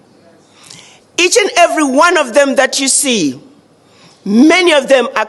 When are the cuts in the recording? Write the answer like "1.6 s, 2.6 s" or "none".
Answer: none